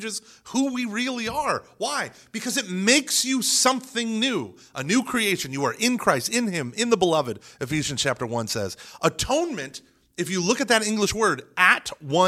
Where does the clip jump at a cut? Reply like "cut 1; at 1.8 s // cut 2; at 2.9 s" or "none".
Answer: none